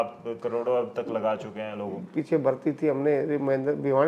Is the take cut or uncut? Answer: cut